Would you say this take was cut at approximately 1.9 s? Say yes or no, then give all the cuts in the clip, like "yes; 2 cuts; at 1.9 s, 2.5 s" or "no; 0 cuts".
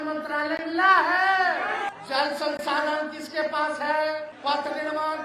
yes; 2 cuts; at 1.9 s, 4.3 s